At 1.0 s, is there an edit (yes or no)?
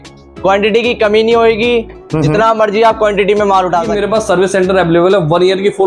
no